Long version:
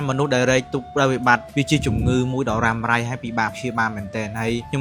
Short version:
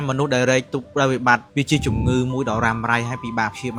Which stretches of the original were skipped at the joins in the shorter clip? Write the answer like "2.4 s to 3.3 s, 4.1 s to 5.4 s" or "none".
none

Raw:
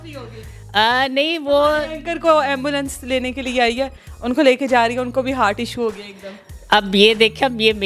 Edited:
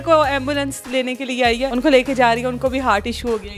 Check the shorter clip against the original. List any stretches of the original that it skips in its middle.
3.9 s to 4.2 s

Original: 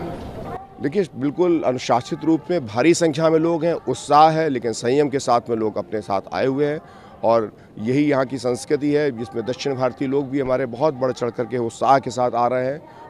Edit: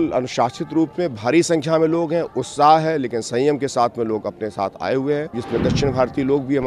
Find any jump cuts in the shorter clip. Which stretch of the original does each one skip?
6.9 s to 9.2 s

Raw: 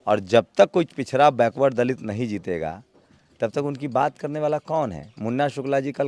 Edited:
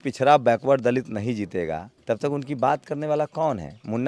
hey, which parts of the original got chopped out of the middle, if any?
2.8 s to 3.2 s

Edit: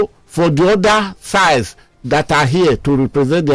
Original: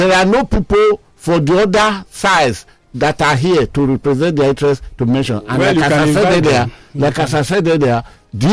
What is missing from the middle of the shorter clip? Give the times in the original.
none

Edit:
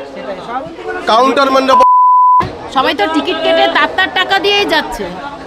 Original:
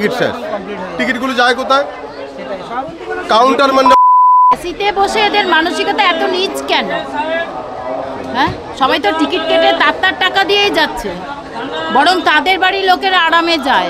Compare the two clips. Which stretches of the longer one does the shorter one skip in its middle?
4.7 s to 8.5 s

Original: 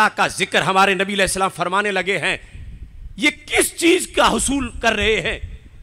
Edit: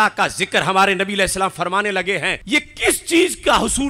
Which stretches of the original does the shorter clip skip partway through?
2.4 s to 3.1 s

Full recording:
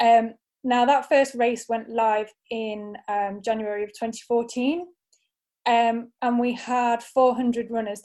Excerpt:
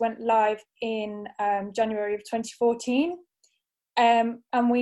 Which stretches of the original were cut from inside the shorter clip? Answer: none

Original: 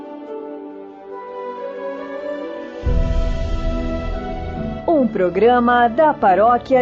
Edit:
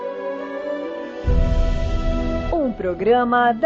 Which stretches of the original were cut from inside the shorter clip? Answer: 4.1 s to 4.8 s

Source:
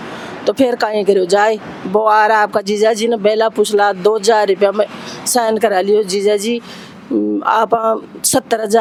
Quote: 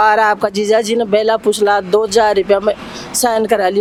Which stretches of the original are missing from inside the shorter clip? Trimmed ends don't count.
none

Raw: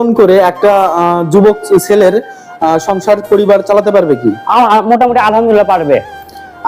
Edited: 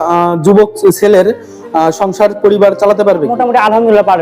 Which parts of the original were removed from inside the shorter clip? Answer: 4.2 s to 4.9 s

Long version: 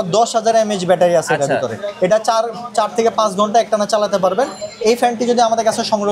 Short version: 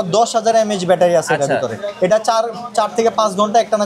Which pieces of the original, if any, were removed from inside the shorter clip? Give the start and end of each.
none

